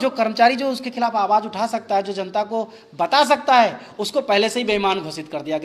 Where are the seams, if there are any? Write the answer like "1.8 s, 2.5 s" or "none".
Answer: none